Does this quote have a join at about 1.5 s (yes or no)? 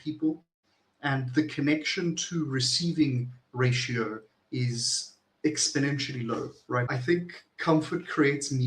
no